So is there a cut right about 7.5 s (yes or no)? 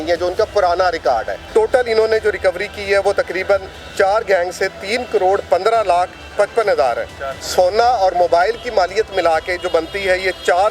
yes